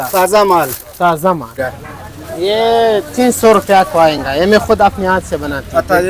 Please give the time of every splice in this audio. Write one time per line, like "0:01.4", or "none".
0:01.6